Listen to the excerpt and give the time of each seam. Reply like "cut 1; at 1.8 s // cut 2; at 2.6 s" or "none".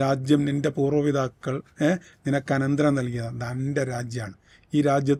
none